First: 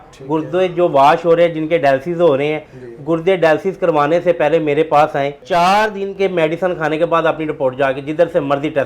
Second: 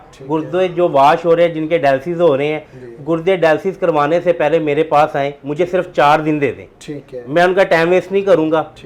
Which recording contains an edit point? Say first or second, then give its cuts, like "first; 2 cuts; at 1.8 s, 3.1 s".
first; 1 cut; at 5.4 s